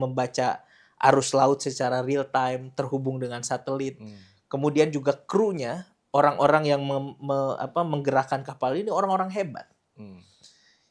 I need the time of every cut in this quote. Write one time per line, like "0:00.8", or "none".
none